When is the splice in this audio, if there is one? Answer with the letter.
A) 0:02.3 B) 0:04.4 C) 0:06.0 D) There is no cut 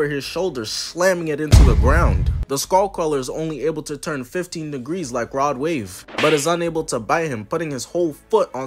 C